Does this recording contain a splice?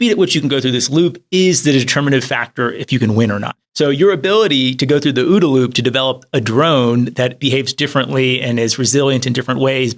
no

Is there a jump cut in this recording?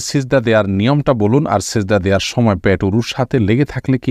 no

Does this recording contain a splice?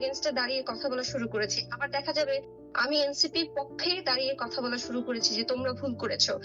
no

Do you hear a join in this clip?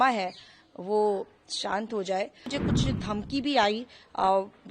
yes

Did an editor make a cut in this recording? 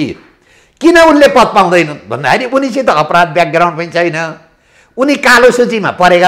no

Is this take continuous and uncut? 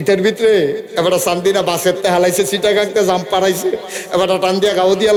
yes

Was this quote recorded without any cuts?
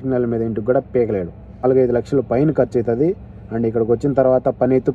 no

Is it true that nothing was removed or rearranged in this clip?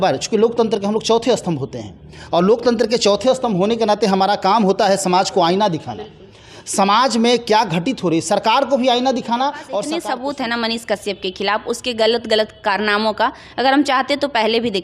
no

